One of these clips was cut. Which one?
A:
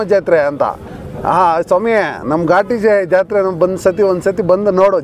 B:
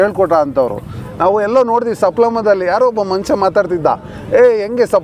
B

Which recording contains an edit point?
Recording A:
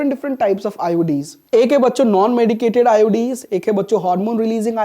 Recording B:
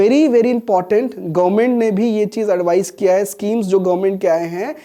A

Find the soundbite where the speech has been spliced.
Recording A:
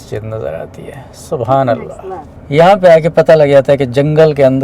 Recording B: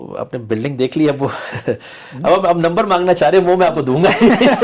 A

